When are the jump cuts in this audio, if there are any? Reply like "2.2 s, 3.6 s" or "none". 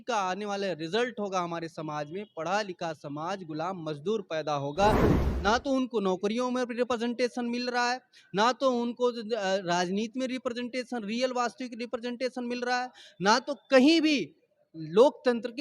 5.1 s